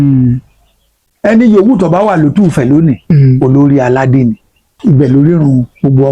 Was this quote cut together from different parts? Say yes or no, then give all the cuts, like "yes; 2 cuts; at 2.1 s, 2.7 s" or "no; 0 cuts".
yes; 1 cut; at 4.7 s